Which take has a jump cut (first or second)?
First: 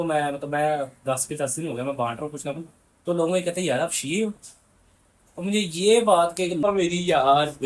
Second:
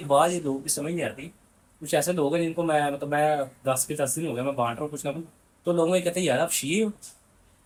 first